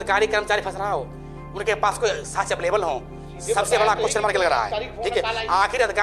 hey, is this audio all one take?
yes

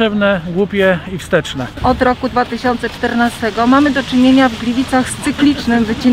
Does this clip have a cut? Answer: yes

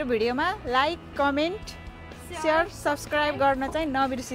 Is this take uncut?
yes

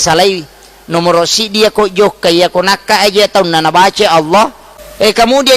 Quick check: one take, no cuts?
no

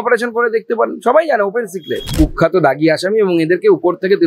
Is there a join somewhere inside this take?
yes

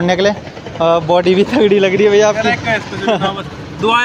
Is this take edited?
no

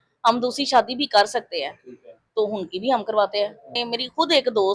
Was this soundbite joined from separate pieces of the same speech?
yes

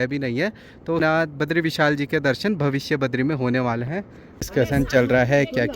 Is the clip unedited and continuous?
no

